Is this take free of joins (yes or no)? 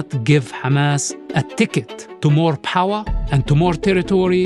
no